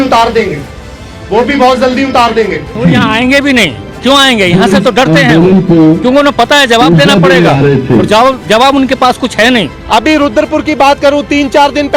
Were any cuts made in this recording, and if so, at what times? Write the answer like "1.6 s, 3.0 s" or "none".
2.8 s, 9.8 s